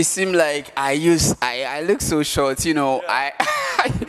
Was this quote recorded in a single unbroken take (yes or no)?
yes